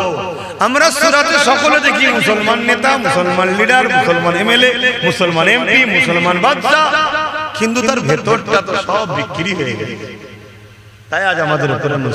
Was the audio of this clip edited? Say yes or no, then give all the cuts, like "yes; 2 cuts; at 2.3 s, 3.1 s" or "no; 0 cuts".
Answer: no; 0 cuts